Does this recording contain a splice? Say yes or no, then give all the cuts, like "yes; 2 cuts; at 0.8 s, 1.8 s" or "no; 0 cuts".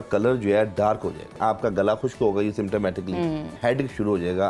yes; 2 cuts; at 1.4 s, 3.5 s